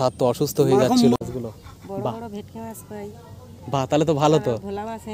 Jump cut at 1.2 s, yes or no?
yes